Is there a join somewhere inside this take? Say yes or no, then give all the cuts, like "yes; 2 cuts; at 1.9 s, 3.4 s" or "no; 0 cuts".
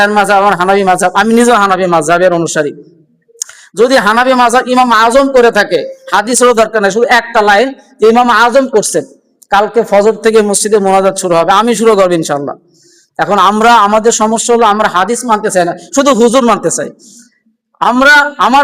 no; 0 cuts